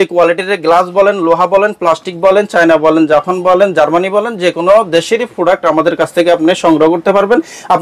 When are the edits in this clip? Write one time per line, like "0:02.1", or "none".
none

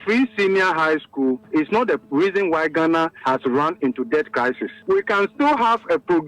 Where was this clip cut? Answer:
0:01.7
0:03.2
0:04.7

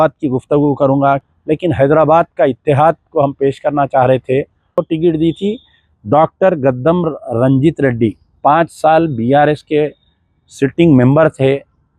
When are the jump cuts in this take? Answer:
0:01.2
0:04.8

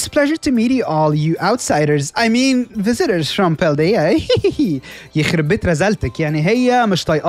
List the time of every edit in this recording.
none

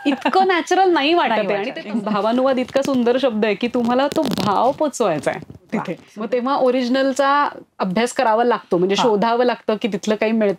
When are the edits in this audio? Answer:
0:01.8
0:06.0

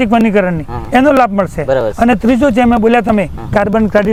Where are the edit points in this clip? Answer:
none

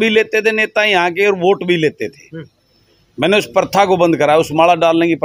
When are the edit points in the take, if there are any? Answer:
none

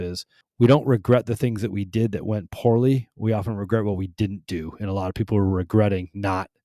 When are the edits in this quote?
none

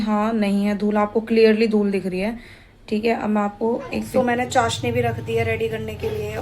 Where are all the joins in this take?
0:04.1

